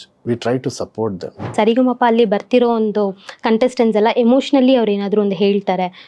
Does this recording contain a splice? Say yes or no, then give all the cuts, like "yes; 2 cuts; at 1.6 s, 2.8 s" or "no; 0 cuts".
yes; 1 cut; at 1.5 s